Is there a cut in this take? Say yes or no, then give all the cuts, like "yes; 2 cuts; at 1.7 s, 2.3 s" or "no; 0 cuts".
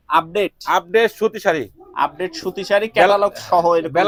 no; 0 cuts